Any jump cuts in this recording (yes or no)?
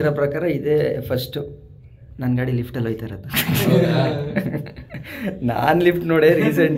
no